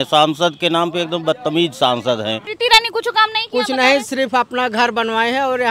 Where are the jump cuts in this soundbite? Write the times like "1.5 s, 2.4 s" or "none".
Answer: 2.5 s

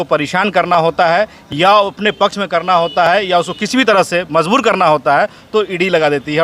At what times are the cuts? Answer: none

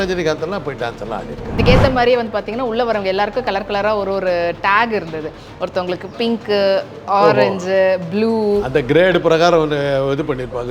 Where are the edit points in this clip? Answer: 1.6 s

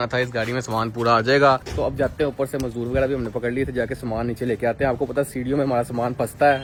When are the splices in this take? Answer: none

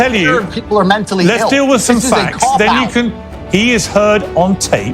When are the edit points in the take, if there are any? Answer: 3.2 s

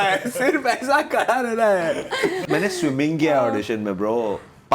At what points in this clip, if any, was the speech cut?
2.4 s

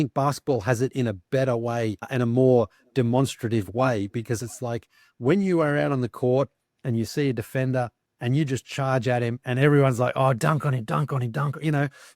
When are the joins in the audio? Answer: 2.1 s, 8.1 s

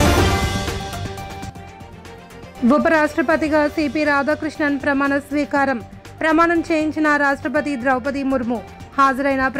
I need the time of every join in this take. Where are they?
none

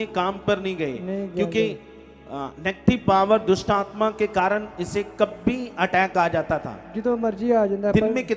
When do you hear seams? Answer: none

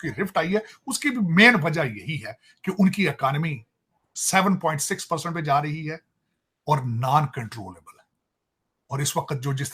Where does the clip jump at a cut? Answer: none

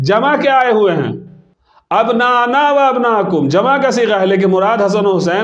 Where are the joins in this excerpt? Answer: none

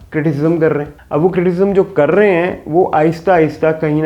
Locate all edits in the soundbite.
1.0 s

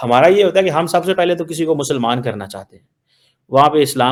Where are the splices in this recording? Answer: none

